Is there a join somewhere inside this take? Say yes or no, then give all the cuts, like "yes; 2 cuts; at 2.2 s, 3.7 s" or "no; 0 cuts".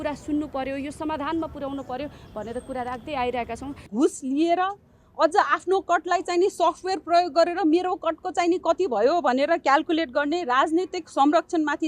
yes; 1 cut; at 3.8 s